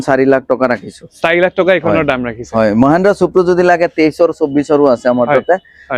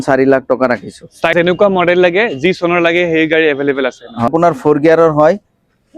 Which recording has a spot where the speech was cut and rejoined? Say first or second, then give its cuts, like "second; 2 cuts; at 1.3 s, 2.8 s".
second; 2 cuts; at 1.3 s, 4.3 s